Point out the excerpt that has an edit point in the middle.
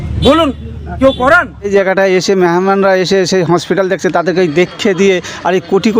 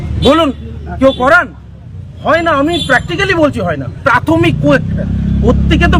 first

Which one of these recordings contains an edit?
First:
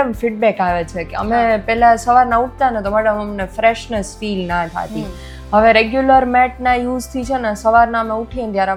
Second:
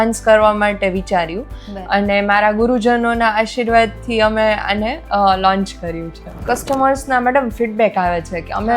second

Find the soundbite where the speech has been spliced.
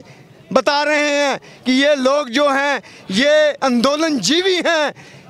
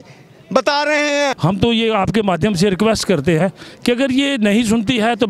second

